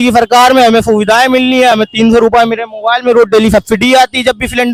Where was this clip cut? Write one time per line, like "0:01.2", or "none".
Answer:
none